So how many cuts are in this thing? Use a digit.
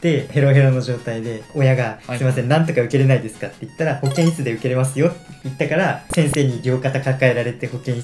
0